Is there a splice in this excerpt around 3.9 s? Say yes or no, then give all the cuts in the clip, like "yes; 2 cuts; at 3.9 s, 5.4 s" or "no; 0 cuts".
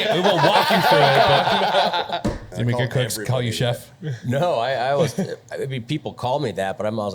no; 1 cut; at 2.4 s